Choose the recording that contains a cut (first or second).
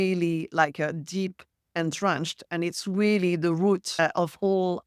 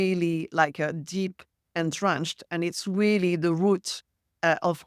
first